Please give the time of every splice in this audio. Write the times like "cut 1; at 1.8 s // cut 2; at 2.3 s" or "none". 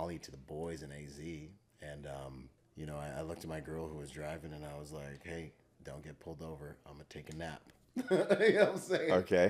cut 1; at 2.6 s // cut 2; at 5.7 s